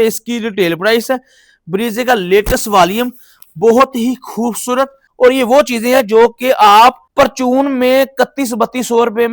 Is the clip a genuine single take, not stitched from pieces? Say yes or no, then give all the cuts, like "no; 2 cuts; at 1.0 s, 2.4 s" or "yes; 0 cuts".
no; 2 cuts; at 5.0 s, 7.0 s